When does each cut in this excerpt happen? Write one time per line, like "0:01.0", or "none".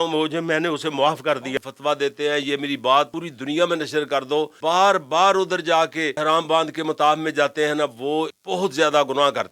0:01.5
0:03.3
0:04.5
0:06.1
0:08.4